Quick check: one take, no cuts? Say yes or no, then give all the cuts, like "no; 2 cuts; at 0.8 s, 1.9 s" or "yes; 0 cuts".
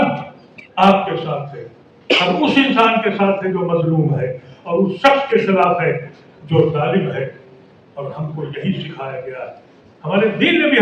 yes; 0 cuts